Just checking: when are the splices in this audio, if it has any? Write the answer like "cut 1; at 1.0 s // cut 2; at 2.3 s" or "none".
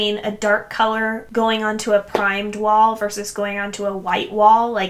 none